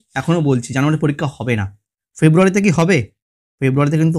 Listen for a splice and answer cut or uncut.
uncut